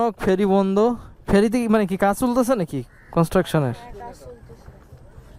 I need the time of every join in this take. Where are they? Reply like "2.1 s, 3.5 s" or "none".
none